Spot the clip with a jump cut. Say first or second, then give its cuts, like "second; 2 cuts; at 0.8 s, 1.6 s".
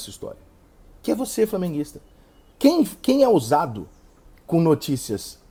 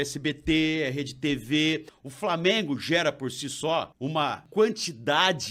second; 2 cuts; at 1.9 s, 4.4 s